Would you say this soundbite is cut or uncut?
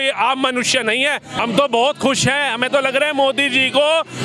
cut